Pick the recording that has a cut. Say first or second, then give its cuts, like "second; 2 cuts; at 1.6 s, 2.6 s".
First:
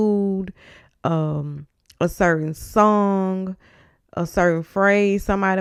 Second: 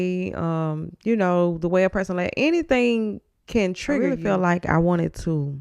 second; 1 cut; at 4.2 s